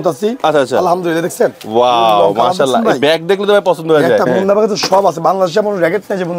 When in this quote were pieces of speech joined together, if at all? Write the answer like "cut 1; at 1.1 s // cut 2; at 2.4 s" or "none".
cut 1; at 4.3 s